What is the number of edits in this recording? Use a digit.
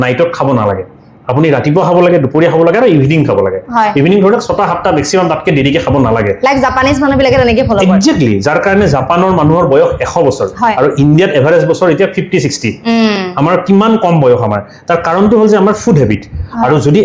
0